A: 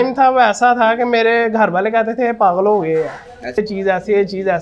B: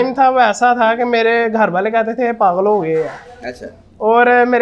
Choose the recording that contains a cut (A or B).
A